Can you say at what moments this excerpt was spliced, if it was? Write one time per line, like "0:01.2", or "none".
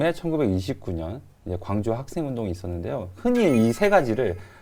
none